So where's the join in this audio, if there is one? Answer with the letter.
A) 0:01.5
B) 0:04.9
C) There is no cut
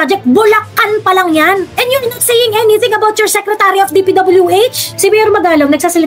B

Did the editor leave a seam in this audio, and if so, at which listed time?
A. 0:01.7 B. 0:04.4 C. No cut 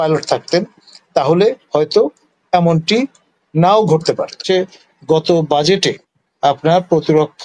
B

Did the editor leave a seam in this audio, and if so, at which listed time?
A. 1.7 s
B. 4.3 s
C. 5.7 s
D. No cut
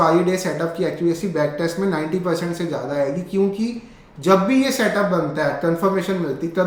D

